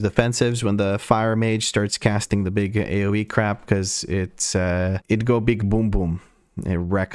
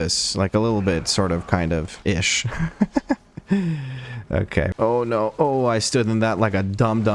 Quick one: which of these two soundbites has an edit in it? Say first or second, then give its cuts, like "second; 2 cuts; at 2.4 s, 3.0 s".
second; 1 cut; at 4.7 s